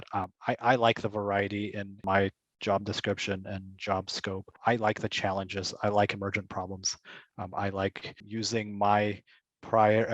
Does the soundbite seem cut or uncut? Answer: cut